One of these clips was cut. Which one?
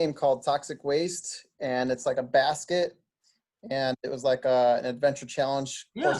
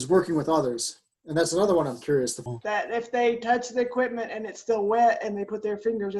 second; 1 cut; at 2.4 s

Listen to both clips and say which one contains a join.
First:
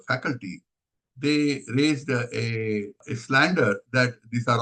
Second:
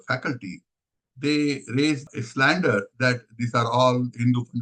second; 1 cut; at 2.0 s

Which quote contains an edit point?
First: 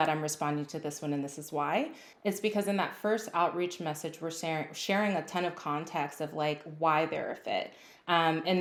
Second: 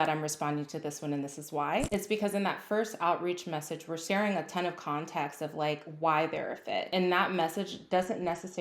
second; 3 cuts; at 1.9 s, 4.0 s, 6.9 s

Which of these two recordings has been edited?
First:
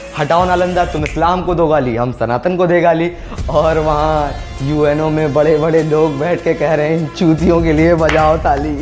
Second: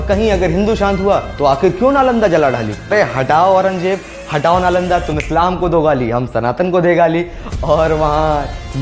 second; 1 cut; at 2.9 s

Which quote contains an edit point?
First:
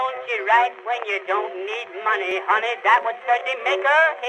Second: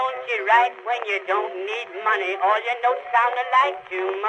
first; 1 cut; at 2.3 s

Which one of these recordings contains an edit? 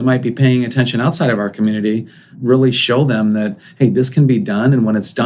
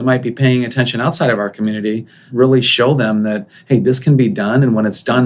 second; 1 cut; at 2.2 s

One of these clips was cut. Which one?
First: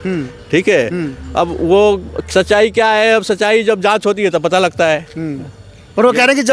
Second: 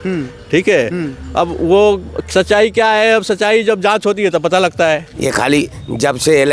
second; 1 cut; at 5.1 s

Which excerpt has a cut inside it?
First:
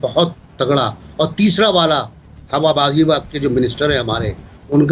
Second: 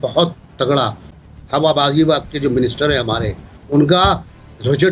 second; 1 cut; at 1.1 s

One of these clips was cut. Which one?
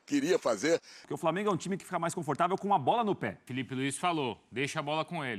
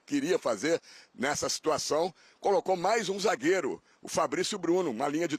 first; 2 cuts; at 1.0 s, 3.5 s

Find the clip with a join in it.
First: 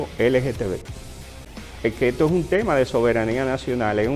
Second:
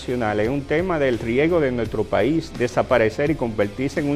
first; 1 cut; at 1.4 s

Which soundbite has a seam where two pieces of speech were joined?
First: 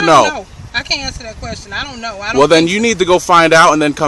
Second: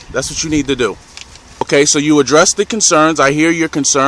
second; 1 cut; at 1.6 s

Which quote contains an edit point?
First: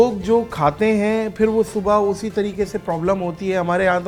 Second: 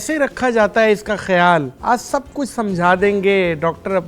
second; 1 cut; at 1.7 s

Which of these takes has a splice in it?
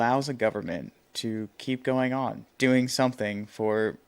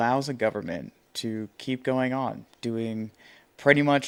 first; 1 cut; at 2.5 s

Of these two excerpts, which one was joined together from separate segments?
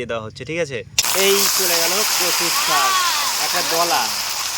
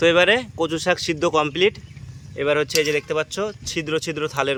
first; 1 cut; at 1.0 s

